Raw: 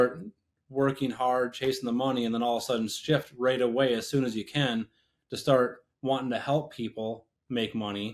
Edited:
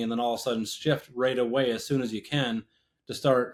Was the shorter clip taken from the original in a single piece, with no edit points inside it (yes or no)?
yes